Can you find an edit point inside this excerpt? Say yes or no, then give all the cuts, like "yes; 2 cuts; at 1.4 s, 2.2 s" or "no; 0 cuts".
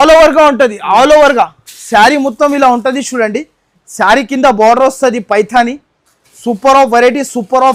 no; 0 cuts